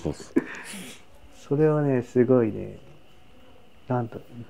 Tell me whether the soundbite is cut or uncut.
uncut